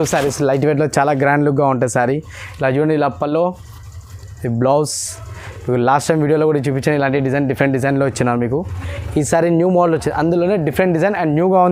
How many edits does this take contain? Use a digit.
0